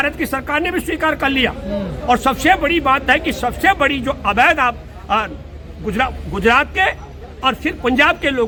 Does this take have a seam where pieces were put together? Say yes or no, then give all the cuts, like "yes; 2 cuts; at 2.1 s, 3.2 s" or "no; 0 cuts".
no; 0 cuts